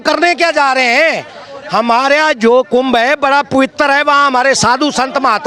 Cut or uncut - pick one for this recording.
uncut